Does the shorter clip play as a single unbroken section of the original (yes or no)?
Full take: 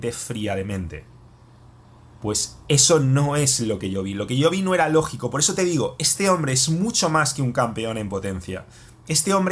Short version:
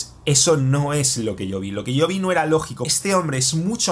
no